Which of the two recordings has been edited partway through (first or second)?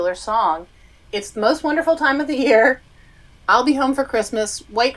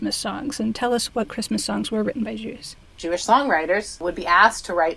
second